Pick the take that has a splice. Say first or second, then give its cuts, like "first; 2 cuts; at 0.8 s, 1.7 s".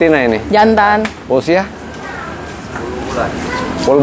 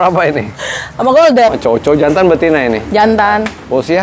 second; 1 cut; at 1.5 s